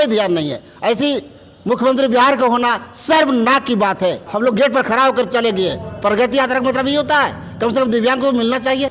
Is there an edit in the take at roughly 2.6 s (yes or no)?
no